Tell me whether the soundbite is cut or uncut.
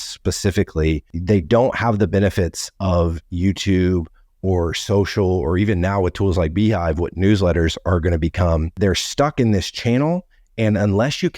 cut